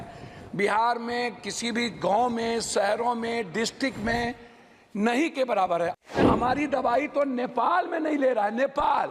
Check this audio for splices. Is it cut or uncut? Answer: cut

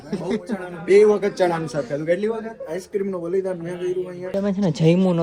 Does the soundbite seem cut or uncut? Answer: cut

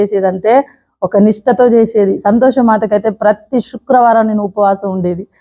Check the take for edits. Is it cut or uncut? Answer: uncut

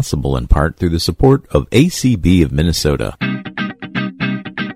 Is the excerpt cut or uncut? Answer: cut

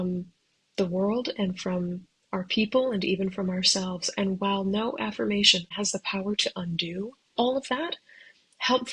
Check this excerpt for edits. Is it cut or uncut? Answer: cut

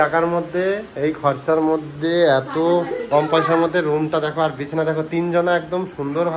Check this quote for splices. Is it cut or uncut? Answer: uncut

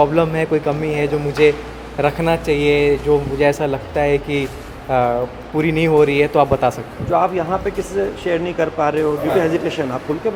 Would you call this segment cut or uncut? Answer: uncut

